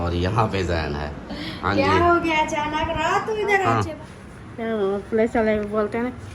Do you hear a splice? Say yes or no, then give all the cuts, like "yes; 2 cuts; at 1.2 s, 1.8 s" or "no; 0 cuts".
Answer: yes; 1 cut; at 3.6 s